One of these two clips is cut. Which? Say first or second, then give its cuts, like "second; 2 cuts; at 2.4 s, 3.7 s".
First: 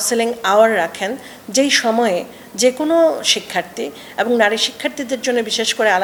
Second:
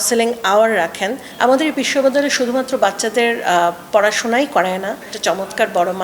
second; 2 cuts; at 1.2 s, 5.1 s